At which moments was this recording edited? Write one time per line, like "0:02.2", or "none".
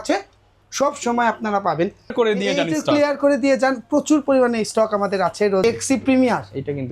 0:02.1
0:05.6